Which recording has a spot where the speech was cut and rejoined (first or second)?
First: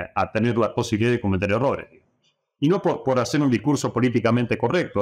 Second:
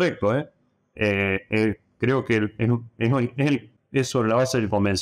second